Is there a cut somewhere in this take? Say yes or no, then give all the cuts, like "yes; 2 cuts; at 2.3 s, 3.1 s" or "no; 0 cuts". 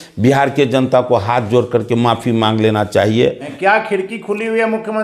yes; 1 cut; at 3.5 s